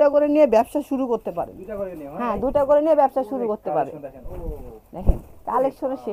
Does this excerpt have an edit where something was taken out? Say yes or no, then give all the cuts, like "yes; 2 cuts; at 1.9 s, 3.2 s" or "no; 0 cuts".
yes; 1 cut; at 4.2 s